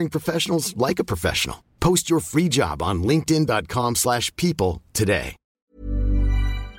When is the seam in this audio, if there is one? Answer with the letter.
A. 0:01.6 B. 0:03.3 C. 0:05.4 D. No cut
C